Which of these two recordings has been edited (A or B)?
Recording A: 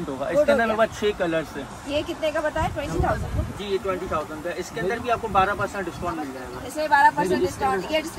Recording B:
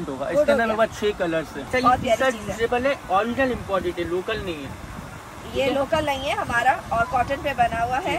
B